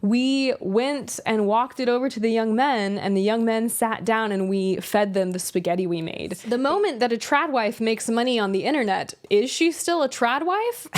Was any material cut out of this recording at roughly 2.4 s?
no; 1 cut; at 6.3 s

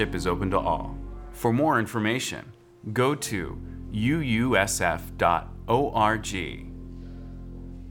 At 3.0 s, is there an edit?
no; 1 cut; at 6.6 s

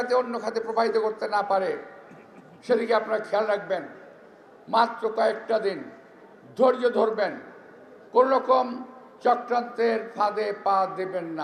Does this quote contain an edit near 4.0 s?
no; 0 cuts

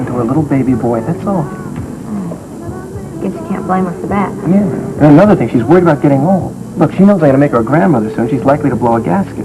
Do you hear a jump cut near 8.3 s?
no; 1 cut; at 4.0 s

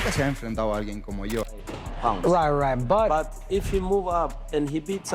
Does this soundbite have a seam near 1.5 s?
yes; 1 cut; at 1.5 s

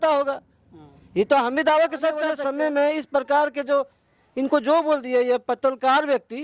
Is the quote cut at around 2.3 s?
yes; 1 cut; at 2.3 s

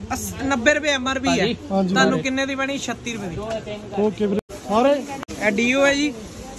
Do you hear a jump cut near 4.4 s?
yes; 2 cuts; at 4.4 s, 5.1 s

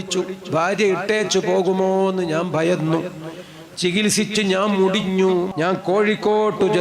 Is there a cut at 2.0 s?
no; 1 cut; at 5.5 s

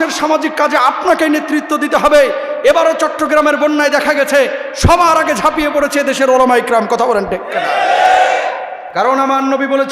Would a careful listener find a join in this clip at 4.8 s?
no; 1 cut; at 8.8 s

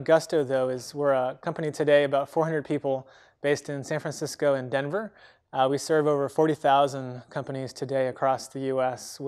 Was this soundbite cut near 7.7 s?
yes; 1 cut; at 7.7 s

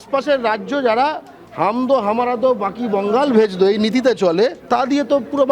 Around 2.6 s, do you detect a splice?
no; 1 cut; at 4.6 s

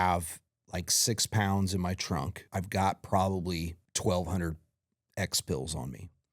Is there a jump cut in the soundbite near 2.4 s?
yes; 2 cuts; at 2.4 s, 3.8 s

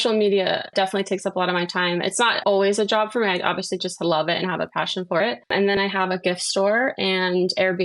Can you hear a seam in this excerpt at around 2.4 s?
yes; 1 cut; at 2.4 s

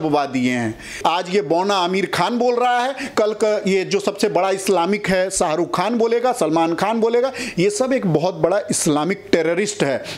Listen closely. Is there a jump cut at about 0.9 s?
yes; 1 cut; at 0.9 s

